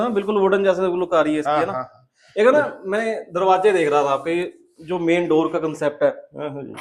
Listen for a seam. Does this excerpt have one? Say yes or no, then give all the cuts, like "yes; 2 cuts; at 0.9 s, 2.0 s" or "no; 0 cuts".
no; 0 cuts